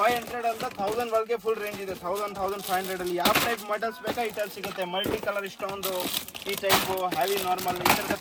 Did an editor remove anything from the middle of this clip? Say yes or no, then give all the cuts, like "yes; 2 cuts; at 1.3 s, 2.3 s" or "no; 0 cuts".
no; 0 cuts